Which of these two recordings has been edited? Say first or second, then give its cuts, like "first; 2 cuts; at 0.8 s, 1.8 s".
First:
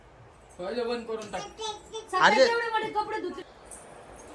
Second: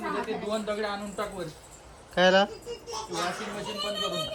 first; 1 cut; at 3.4 s